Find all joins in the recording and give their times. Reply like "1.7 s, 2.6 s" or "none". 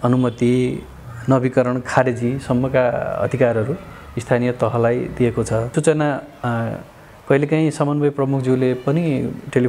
5.7 s